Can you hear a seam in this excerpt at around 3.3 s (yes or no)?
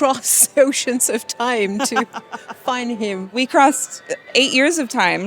yes